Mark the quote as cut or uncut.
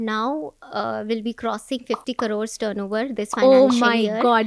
uncut